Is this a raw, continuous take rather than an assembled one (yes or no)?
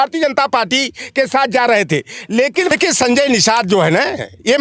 no